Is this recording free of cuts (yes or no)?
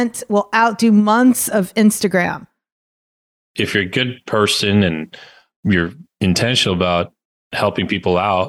no